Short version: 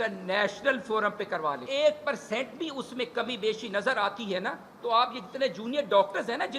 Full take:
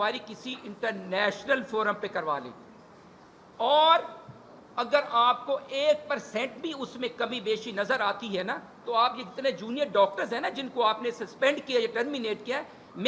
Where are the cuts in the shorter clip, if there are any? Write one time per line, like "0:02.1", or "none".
0:01.6